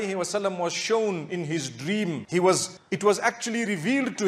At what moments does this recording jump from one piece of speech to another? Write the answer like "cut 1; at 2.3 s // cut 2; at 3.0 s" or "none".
none

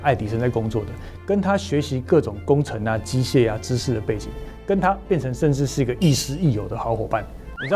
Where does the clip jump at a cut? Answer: none

